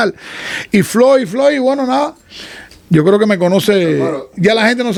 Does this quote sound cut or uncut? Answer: uncut